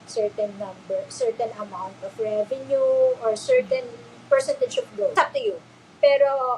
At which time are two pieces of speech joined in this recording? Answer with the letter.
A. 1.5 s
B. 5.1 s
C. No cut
B